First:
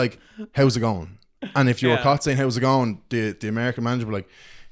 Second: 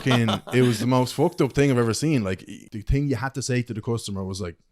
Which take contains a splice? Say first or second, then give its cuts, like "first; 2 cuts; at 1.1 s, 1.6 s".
second; 1 cut; at 2.5 s